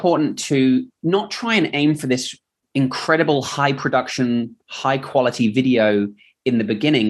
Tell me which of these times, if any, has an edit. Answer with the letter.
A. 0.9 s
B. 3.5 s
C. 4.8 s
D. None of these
A